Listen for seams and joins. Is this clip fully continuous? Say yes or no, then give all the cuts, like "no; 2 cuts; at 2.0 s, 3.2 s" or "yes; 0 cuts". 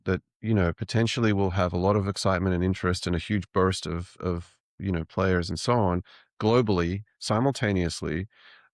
yes; 0 cuts